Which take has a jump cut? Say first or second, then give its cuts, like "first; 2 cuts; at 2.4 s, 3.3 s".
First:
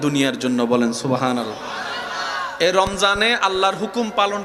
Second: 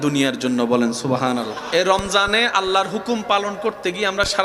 second; 1 cut; at 1.6 s